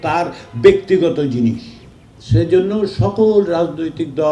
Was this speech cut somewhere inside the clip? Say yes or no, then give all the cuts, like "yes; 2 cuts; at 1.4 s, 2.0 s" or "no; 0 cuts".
no; 0 cuts